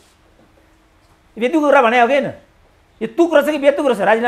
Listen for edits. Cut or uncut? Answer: uncut